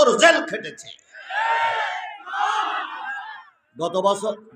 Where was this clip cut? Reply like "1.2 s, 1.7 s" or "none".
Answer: 2.2 s